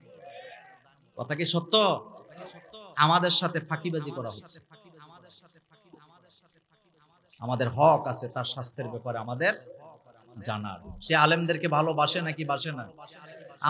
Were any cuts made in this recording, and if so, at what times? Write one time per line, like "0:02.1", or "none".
none